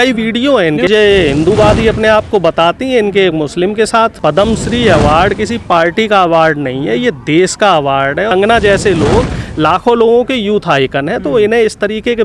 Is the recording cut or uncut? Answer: cut